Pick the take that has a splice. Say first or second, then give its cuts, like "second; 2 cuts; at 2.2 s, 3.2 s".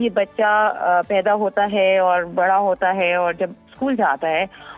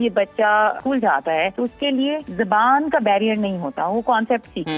second; 2 cuts; at 0.8 s, 1.8 s